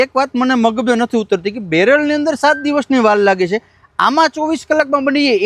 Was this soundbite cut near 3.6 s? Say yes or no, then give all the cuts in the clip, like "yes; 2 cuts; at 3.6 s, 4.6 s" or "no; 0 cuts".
no; 0 cuts